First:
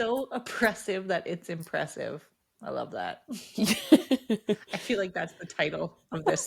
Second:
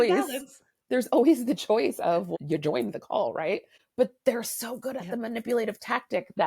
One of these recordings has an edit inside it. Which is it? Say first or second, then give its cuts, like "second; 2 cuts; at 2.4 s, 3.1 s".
second; 2 cuts; at 2.3 s, 3.8 s